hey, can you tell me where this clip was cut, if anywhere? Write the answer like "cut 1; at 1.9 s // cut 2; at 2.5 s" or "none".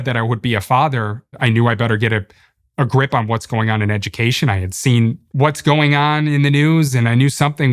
cut 1; at 1.3 s // cut 2; at 5.2 s